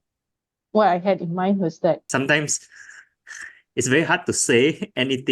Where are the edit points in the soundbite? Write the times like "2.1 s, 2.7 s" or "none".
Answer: 2.0 s

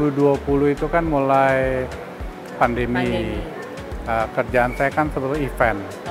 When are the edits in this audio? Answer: none

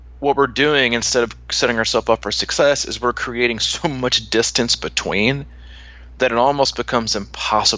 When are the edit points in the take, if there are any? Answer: none

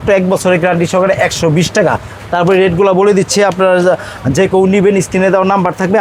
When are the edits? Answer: none

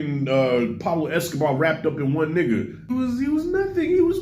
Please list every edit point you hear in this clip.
2.9 s

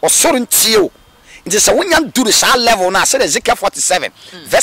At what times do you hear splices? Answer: none

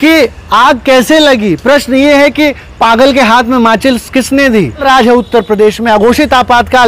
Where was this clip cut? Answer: 4.8 s

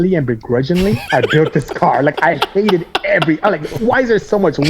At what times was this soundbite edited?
1.0 s

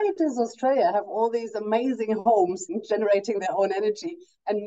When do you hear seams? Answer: 2.6 s

